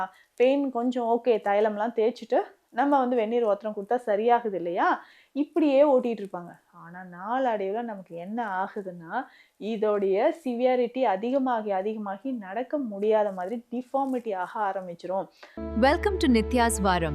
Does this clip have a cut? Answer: yes; 1 cut; at 15.5 s

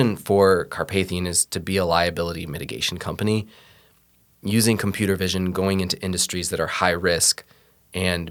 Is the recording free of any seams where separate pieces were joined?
yes; 0 cuts

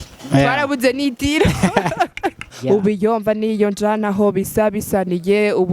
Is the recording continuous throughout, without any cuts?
no; 1 cut; at 2.5 s

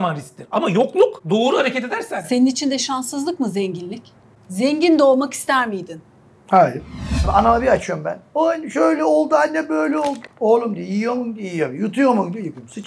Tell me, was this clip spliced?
yes; 2 cuts; at 1.2 s, 7.3 s

